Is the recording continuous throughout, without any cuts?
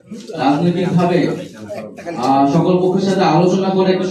yes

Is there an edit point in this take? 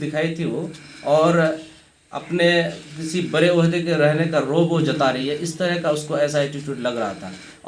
no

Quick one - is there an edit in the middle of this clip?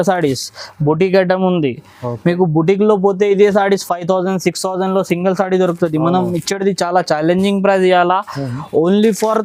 no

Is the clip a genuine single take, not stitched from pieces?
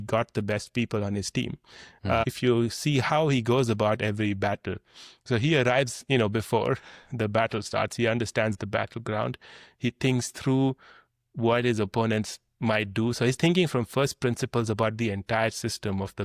no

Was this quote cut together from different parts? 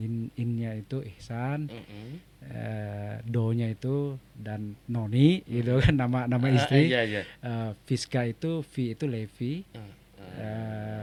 no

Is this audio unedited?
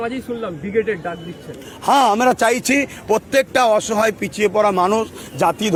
yes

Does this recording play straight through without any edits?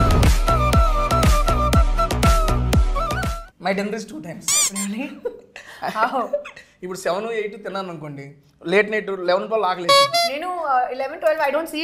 no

